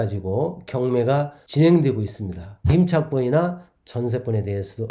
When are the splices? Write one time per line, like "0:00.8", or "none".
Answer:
0:02.7